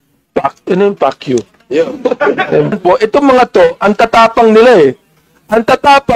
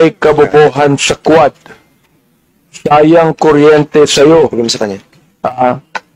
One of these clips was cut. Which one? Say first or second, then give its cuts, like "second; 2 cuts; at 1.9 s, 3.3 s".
first; 1 cut; at 2.8 s